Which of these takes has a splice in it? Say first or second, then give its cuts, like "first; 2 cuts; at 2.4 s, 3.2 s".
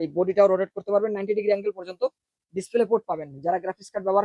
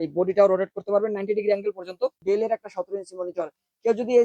second; 1 cut; at 2.2 s